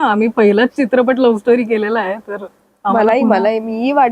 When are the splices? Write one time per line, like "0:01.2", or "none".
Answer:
none